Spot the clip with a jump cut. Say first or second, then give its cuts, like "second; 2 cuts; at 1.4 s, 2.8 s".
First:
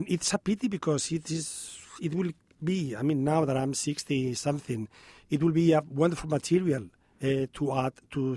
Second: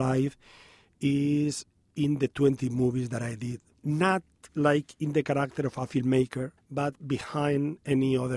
second; 3 cuts; at 3.7 s, 4.4 s, 6.6 s